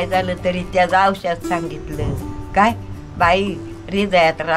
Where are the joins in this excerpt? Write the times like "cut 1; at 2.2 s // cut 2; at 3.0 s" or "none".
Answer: none